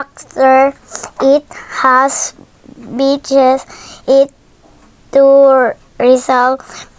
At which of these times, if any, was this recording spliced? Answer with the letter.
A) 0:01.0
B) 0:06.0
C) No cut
A